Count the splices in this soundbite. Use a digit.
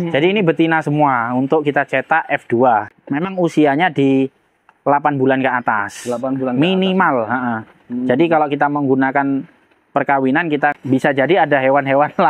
2